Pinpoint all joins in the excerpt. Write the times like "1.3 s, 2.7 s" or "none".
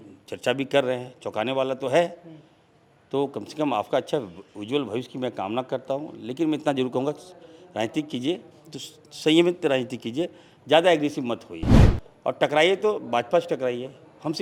none